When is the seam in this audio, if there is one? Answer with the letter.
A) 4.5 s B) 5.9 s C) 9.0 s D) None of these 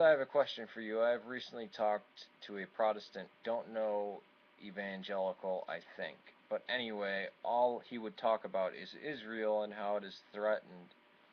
D